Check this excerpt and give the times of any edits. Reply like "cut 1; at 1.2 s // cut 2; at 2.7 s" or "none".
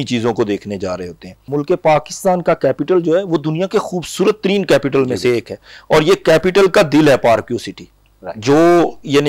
cut 1; at 1.5 s